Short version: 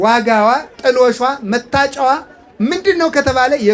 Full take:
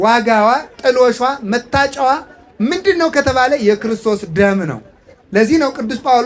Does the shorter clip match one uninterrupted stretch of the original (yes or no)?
yes